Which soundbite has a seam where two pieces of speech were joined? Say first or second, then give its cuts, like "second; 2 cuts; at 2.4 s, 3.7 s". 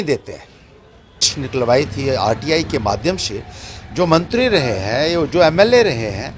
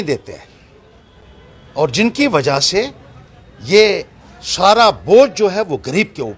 first; 1 cut; at 1.4 s